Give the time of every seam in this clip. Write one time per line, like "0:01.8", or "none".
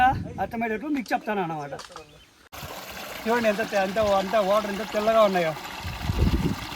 0:02.5